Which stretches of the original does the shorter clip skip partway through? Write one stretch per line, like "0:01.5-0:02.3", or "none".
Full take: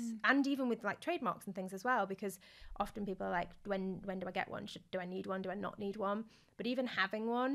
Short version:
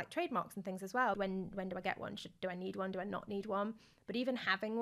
0:02.1-0:03.7